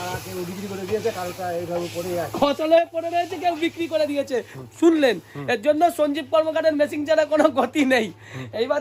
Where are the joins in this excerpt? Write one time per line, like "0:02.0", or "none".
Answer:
none